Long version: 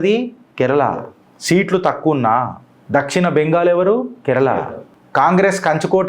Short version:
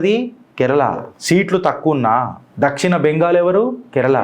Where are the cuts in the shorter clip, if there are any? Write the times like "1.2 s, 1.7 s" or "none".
1.1 s, 2.4 s